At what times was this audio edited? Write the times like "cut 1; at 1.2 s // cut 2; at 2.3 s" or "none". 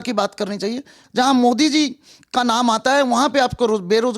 cut 1; at 1.0 s